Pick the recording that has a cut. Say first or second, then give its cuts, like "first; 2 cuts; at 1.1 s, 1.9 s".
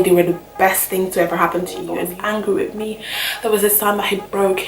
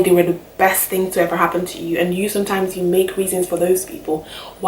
first; 1 cut; at 1.9 s